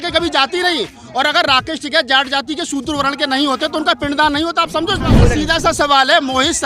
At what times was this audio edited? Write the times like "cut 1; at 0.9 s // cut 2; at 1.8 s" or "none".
cut 1; at 5.2 s